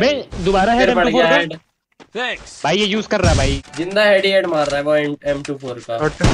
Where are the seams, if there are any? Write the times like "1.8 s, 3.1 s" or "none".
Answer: 3.6 s